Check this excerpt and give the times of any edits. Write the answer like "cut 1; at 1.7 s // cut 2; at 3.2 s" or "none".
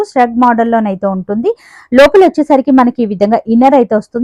none